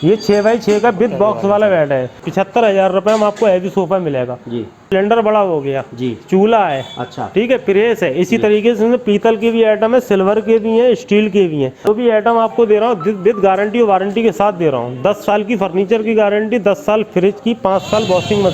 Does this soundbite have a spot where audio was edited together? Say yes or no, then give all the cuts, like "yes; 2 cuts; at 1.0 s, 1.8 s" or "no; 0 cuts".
yes; 3 cuts; at 2.2 s, 4.9 s, 11.9 s